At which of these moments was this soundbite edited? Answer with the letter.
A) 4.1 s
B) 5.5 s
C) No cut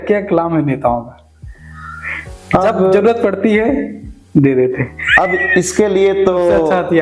C